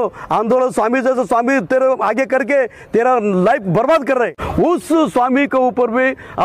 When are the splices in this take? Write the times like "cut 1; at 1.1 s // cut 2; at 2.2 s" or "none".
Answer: cut 1; at 4.4 s

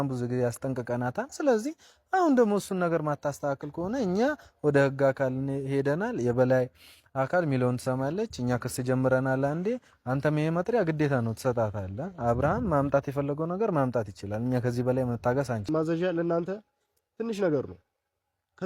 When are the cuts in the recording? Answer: cut 1; at 15.7 s

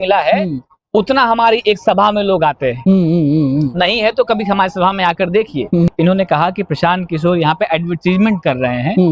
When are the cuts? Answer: cut 1; at 5.9 s

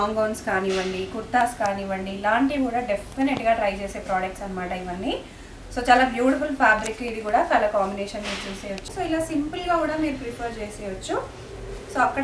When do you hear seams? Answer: cut 1; at 8.9 s

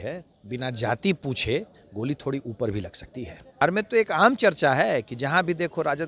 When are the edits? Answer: cut 1; at 3.6 s

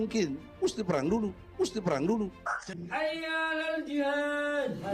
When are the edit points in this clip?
cut 1; at 2.5 s

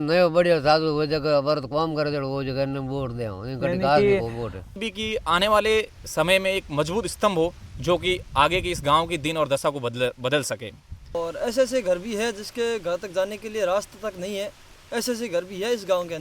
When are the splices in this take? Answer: cut 1; at 4.8 s // cut 2; at 11.1 s

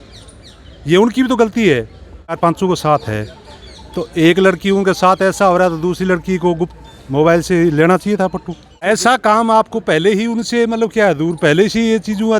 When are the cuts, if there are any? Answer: cut 1; at 2.3 s // cut 2; at 8.8 s

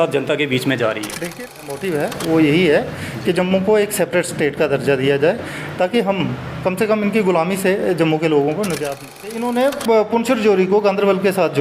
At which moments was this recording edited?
cut 1; at 1.4 s // cut 2; at 9.3 s

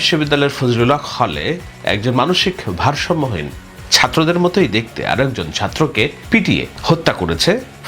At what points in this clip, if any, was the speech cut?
cut 1; at 6.5 s

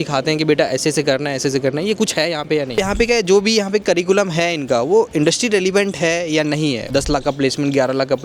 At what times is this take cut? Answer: cut 1; at 2.8 s // cut 2; at 6.8 s

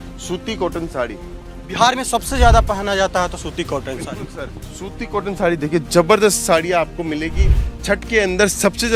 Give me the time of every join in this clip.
none

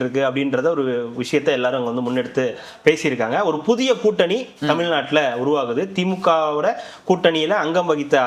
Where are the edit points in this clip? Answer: none

